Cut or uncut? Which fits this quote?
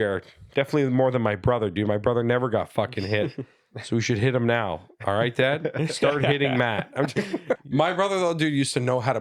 cut